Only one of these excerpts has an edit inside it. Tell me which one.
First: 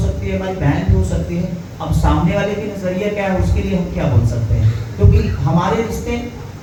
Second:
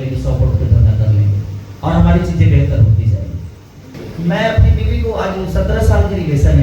second; 1 cut; at 4.0 s

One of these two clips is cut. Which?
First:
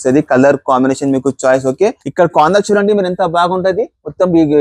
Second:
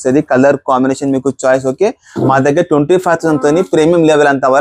first; 1 cut; at 2.0 s

